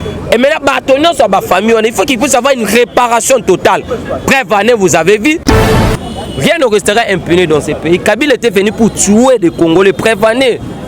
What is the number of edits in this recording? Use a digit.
1